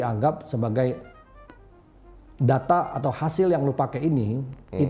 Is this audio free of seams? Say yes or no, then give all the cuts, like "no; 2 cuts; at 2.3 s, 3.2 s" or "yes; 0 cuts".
yes; 0 cuts